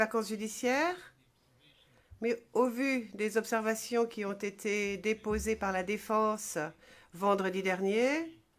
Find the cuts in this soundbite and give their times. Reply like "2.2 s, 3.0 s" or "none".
7.6 s